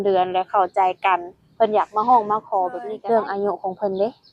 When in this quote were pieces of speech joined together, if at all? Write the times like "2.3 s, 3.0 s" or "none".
2.8 s